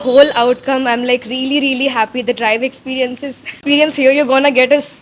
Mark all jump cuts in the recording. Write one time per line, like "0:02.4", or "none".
0:03.6